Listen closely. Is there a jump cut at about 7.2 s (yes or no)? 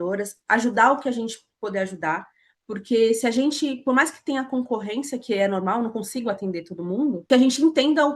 yes